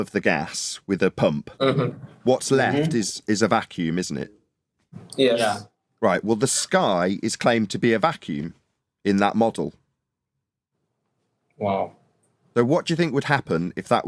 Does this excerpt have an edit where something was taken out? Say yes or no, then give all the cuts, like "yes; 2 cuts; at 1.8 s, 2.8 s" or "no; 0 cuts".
no; 0 cuts